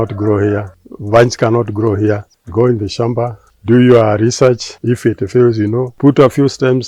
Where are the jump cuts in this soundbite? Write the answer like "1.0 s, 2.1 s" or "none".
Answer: 5.9 s